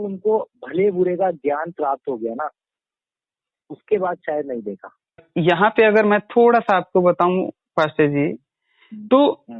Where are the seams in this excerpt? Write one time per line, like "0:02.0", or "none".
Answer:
0:05.3